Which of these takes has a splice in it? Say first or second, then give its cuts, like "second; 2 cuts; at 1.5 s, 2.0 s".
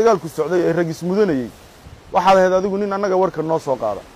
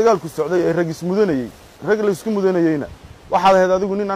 first; 1 cut; at 1.7 s